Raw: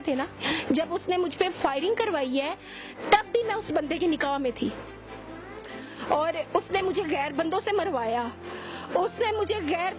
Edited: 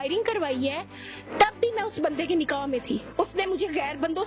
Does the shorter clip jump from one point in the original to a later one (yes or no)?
yes